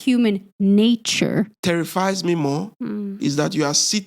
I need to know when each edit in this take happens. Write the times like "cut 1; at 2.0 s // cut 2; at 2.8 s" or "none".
cut 1; at 1.5 s